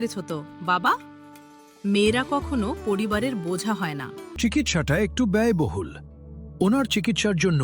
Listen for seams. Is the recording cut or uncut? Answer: cut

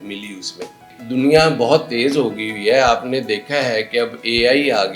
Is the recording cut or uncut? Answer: cut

